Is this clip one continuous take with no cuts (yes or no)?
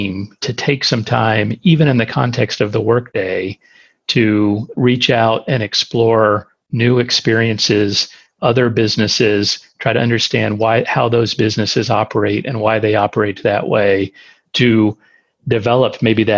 no